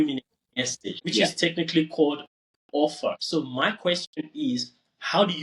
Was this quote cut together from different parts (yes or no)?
yes